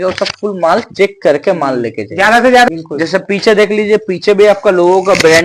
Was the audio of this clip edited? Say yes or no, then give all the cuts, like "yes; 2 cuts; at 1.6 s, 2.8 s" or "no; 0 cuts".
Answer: yes; 1 cut; at 2.7 s